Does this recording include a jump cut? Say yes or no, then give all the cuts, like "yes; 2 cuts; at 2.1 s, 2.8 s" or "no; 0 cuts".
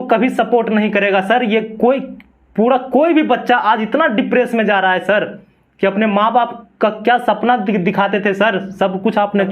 no; 0 cuts